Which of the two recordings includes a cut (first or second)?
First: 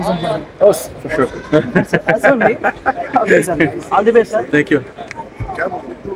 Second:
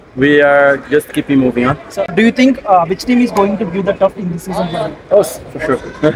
second